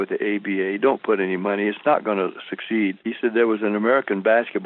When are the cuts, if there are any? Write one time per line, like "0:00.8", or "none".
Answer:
0:03.0